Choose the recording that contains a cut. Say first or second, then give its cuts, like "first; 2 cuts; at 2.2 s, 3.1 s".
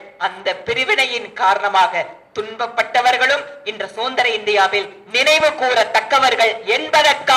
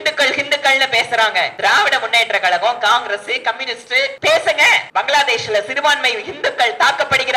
second; 3 cuts; at 1.5 s, 4.1 s, 4.8 s